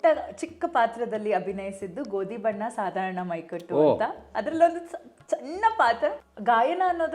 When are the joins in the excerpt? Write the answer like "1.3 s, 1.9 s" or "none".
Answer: 6.2 s